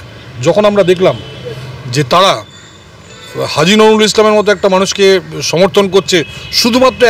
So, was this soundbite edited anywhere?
no; 0 cuts

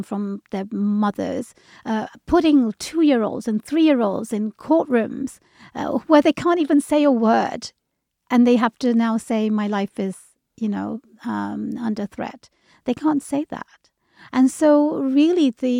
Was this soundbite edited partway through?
no; 0 cuts

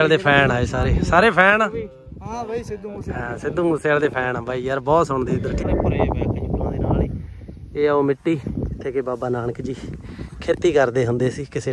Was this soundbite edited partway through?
yes; 1 cut; at 5.6 s

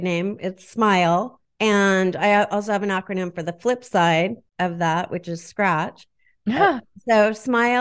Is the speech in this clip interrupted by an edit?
yes; 2 cuts; at 1.4 s, 4.4 s

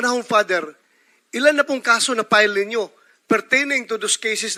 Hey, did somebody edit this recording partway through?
no; 0 cuts

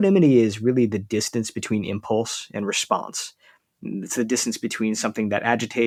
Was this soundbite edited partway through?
no; 0 cuts

